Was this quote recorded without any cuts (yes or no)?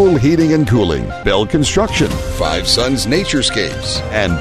no